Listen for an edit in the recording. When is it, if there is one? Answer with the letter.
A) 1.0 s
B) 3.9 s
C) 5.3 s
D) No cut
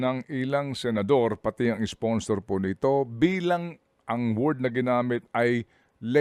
D